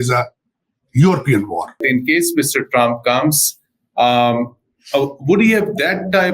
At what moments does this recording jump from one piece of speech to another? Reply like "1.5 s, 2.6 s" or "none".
1.8 s